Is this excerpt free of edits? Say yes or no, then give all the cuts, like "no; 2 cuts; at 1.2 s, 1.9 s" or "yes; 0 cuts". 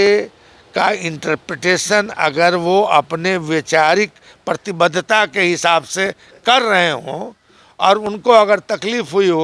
yes; 0 cuts